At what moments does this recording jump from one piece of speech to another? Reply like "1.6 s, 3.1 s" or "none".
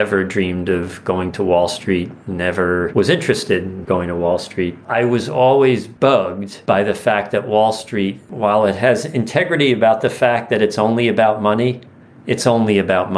4.8 s